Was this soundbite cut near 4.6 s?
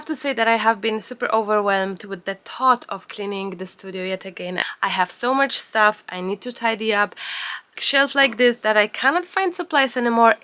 yes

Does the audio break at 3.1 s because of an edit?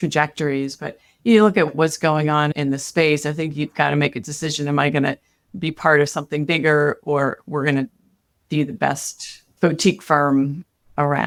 no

